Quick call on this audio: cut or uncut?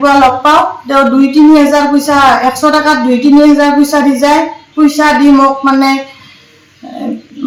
uncut